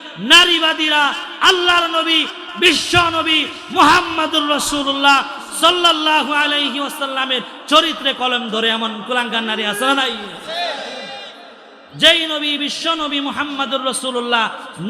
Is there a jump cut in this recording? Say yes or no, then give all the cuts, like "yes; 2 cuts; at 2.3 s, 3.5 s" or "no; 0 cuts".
no; 0 cuts